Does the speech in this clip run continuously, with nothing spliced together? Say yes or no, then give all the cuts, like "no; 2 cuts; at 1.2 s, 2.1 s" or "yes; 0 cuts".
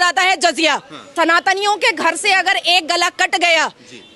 no; 1 cut; at 1.0 s